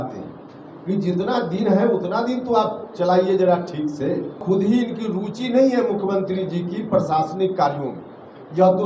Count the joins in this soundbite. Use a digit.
1